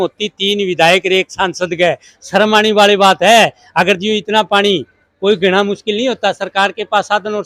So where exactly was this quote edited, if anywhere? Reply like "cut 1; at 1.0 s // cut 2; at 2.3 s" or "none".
none